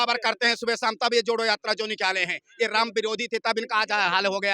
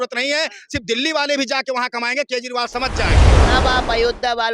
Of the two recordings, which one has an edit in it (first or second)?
second